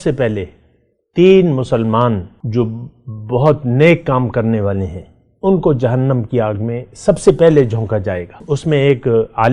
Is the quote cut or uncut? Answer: cut